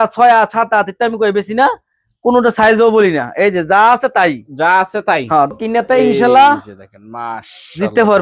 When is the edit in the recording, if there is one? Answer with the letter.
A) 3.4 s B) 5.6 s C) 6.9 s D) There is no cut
B